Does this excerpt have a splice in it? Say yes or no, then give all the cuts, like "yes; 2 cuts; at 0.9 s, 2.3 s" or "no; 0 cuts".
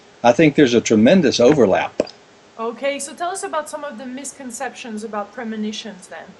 yes; 1 cut; at 1.5 s